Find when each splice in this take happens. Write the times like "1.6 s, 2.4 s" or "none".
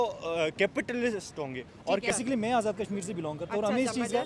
2.1 s